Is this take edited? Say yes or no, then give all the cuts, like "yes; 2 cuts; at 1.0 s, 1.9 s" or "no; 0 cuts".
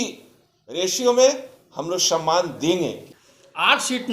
yes; 1 cut; at 3.1 s